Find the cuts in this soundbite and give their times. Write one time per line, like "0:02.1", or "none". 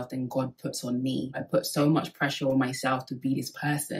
0:01.4